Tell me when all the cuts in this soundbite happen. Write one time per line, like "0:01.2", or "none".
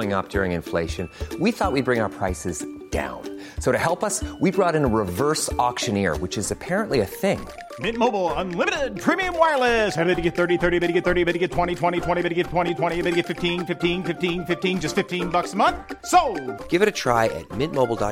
none